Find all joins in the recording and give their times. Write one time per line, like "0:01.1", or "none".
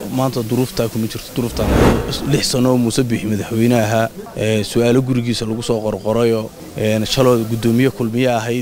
0:01.9
0:04.2
0:06.6